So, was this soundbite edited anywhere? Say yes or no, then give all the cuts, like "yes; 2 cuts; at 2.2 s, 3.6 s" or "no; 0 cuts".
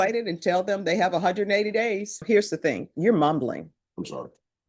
yes; 1 cut; at 2.2 s